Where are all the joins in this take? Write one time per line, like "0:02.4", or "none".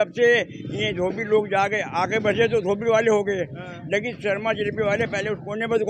none

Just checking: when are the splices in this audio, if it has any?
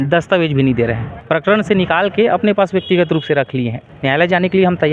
0:01.1
0:03.8

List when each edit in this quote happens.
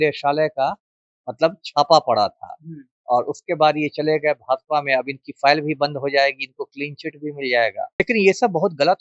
0:08.0

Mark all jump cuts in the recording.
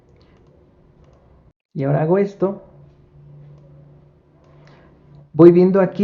0:01.6

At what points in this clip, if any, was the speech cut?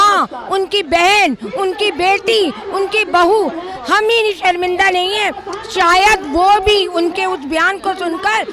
none

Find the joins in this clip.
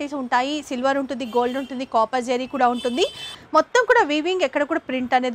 0:03.3

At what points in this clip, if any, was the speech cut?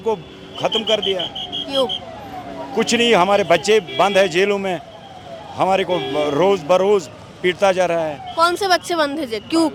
none

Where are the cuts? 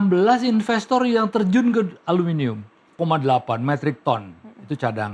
0:03.0

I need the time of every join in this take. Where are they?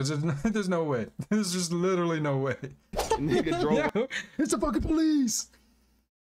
0:02.9

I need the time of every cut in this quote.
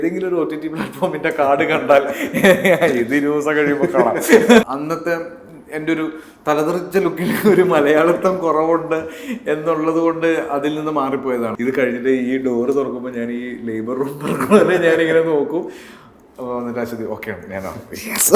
0:04.6
0:11.5

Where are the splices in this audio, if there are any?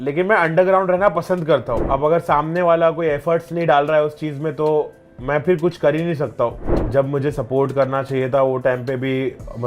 0:01.8
0:06.7

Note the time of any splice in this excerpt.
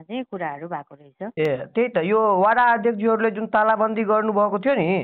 none

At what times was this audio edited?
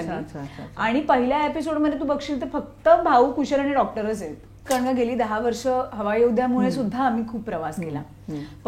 0:04.6

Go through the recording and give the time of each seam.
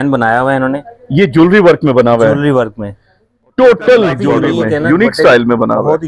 0:04.4

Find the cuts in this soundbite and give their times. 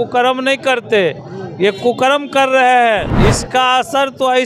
0:03.1

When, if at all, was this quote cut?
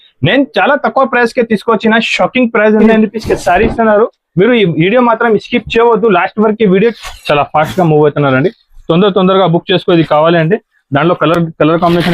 0:02.9
0:06.9

